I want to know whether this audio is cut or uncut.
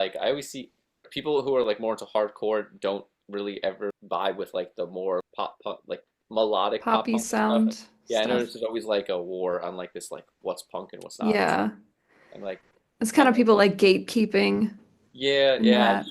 cut